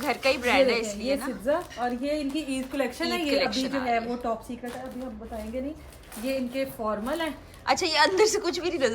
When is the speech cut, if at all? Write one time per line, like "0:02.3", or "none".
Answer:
none